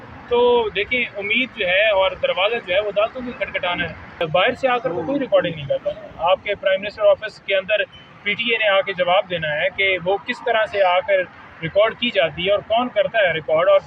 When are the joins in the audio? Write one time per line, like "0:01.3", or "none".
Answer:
0:04.2